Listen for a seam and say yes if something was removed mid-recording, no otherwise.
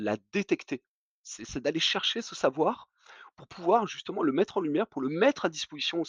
no